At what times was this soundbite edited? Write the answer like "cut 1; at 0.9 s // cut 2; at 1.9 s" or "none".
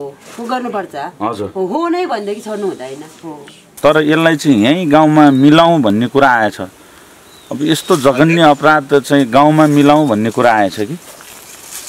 cut 1; at 3.8 s